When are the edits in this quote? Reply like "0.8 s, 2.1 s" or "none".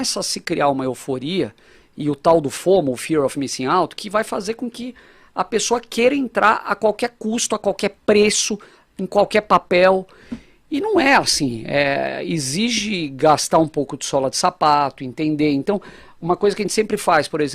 none